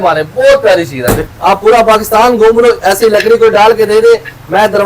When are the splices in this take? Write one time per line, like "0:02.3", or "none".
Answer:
0:01.2